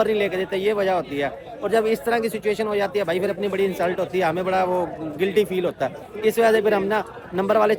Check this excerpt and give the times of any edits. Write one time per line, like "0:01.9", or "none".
none